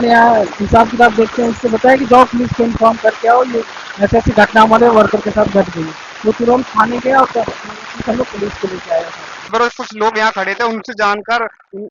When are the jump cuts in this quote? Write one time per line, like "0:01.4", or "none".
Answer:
0:09.5